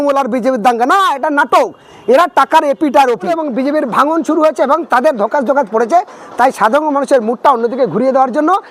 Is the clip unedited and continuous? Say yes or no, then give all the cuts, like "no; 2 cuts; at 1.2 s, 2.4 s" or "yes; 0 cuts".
no; 1 cut; at 3.3 s